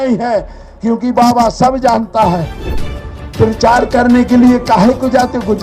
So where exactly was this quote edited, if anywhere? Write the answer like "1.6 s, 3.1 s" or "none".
2.6 s